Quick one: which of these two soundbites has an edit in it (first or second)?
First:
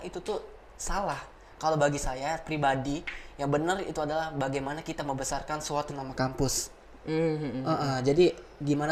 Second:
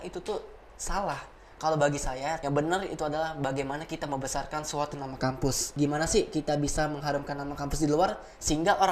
second